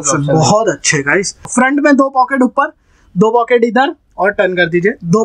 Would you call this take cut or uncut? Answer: cut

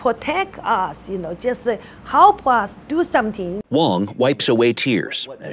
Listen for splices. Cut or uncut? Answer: uncut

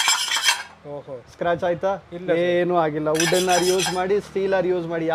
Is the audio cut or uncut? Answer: uncut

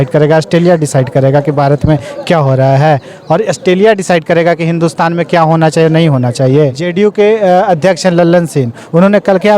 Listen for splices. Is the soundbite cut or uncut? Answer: cut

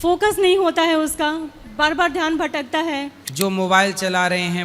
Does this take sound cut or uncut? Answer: cut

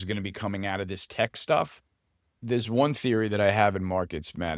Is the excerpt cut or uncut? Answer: cut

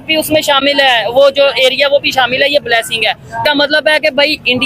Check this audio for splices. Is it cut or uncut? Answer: cut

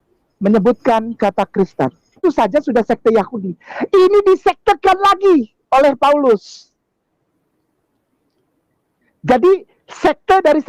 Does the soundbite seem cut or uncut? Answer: cut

